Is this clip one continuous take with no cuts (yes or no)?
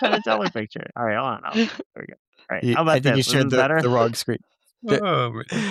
yes